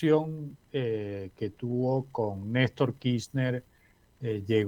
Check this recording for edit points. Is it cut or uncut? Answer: uncut